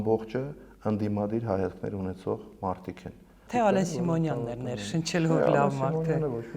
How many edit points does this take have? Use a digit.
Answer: 1